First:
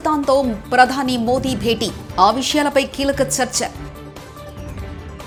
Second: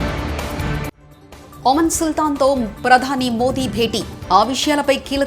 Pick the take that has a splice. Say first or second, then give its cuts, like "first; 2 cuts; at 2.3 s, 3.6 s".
second; 1 cut; at 1.1 s